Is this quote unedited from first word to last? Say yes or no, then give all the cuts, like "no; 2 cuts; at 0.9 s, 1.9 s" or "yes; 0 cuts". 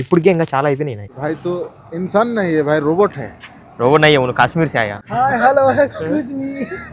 no; 2 cuts; at 1.1 s, 5.0 s